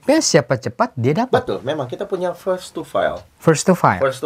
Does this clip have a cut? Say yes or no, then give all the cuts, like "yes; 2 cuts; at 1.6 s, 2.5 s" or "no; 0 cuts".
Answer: no; 0 cuts